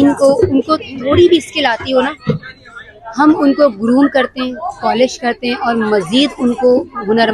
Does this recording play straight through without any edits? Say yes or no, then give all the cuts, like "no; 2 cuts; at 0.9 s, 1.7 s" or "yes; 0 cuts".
yes; 0 cuts